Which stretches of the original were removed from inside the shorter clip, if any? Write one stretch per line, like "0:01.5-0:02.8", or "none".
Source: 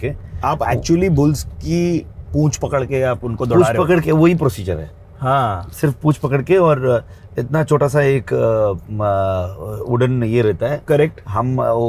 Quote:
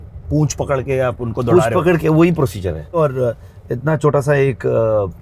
0:05.0-0:06.6

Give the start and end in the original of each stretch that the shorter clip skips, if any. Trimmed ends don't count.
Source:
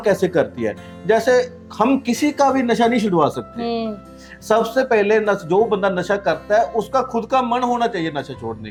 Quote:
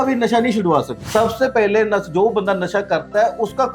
0:03.4-0:04.3

